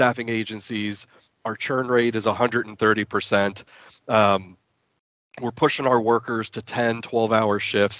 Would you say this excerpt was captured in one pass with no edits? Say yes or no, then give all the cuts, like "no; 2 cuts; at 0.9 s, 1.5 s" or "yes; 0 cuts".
yes; 0 cuts